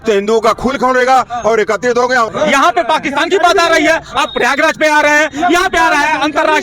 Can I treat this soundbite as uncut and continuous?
no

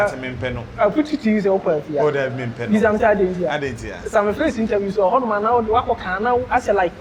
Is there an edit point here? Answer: no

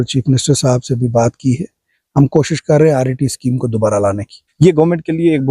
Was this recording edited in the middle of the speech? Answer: yes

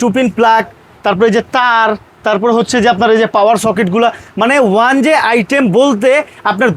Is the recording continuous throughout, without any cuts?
yes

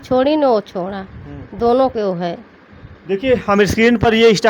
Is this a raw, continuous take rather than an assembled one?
yes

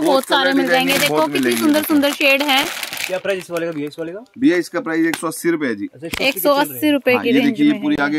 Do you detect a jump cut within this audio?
no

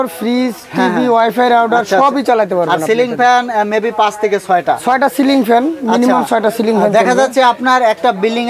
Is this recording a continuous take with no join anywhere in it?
yes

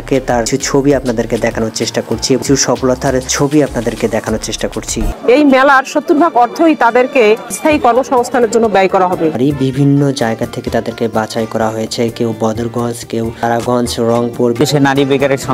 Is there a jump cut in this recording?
yes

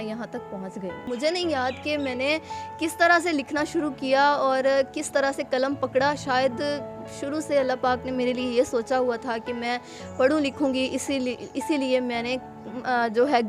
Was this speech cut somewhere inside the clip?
yes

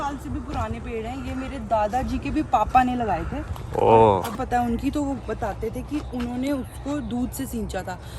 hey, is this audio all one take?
no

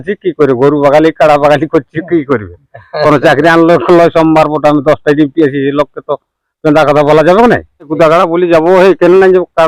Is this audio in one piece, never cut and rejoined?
no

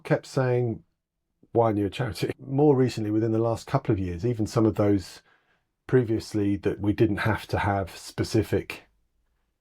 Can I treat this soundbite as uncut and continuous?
no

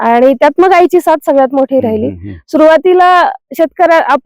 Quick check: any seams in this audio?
no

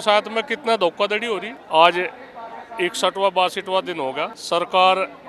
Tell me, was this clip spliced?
no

